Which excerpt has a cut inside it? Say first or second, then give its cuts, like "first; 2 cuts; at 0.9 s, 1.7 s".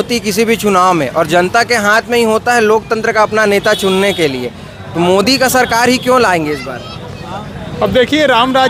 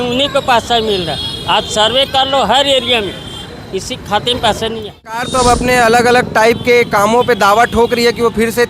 second; 1 cut; at 5.3 s